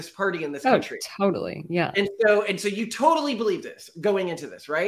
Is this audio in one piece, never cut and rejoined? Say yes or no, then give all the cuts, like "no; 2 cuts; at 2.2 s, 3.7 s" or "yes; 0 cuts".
yes; 0 cuts